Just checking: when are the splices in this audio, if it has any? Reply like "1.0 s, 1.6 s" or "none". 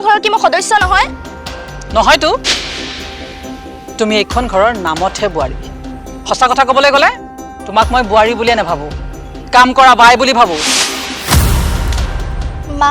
none